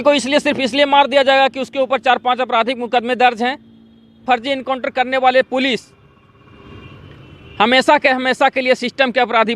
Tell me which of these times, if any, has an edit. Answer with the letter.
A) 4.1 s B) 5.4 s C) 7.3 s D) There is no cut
A